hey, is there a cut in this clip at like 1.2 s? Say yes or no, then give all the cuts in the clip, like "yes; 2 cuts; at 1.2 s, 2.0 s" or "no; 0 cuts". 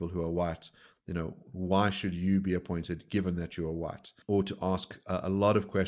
no; 1 cut; at 4.1 s